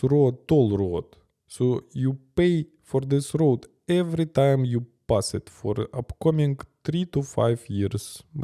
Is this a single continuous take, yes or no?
yes